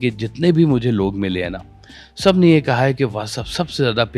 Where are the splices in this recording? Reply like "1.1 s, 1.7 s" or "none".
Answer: none